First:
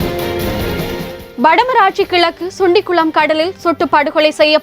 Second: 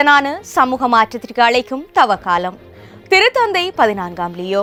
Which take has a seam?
first; 1 cut; at 1.1 s

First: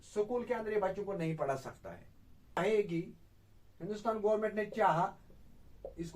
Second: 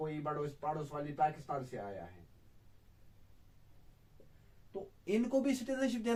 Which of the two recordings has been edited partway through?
first; 1 cut; at 2.6 s

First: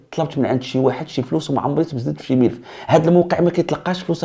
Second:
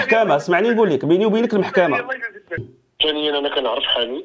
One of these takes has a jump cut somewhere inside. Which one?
second; 1 cut; at 2.8 s

